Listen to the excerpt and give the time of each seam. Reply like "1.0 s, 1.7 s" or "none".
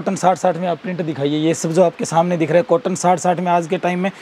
none